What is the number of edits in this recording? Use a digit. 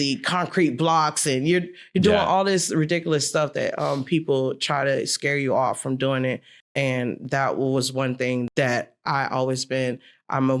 1